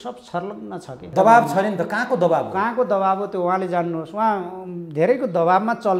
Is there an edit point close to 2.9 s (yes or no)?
no